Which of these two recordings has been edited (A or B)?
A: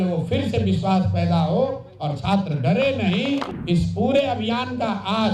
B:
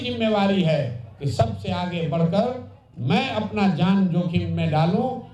A